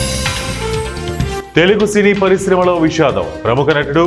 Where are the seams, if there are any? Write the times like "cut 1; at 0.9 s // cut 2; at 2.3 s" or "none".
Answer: cut 1; at 1.4 s